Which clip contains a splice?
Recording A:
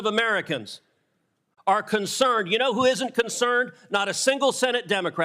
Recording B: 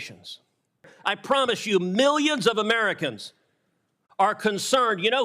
B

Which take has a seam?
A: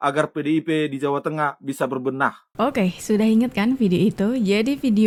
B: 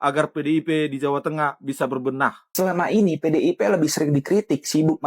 B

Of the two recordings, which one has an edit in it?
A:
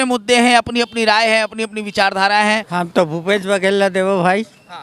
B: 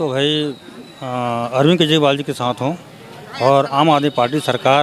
A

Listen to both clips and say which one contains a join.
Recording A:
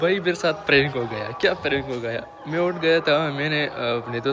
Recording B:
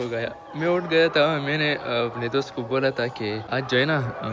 B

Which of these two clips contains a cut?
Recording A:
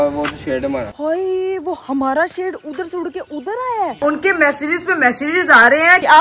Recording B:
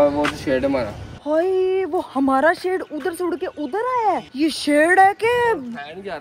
A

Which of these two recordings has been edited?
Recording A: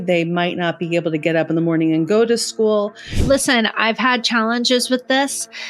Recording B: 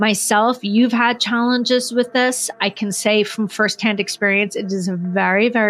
A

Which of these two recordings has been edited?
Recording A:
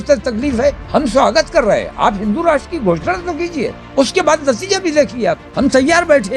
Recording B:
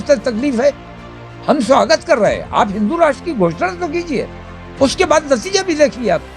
A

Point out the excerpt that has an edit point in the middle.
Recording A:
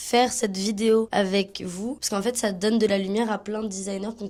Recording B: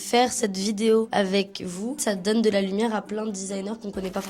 B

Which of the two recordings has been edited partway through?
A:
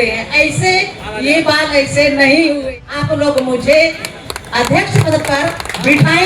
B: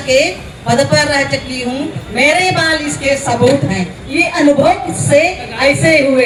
A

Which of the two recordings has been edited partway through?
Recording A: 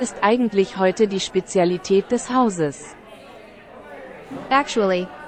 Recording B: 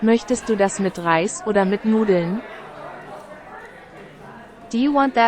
B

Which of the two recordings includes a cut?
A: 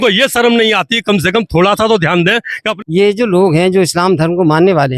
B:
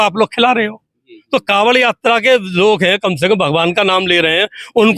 A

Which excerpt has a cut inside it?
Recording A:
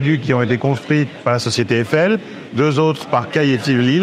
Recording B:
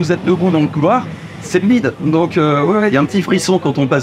B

